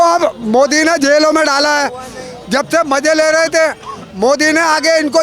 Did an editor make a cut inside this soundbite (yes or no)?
no